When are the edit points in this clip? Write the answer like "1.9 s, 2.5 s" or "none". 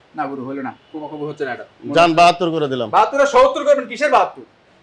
none